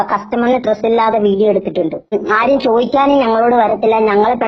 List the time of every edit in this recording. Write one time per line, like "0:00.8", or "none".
0:02.2